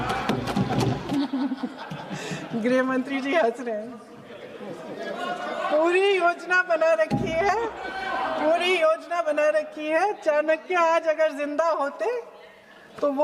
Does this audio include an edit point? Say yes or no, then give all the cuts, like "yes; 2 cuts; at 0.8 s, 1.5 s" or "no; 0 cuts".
yes; 1 cut; at 1.1 s